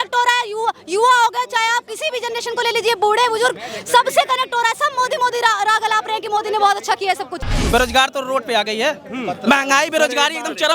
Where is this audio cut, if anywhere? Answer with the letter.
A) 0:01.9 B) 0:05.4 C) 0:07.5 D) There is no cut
C